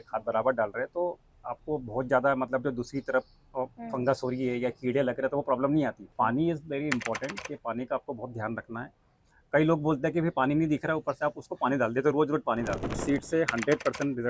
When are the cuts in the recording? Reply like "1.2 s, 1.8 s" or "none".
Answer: 6.0 s, 13.0 s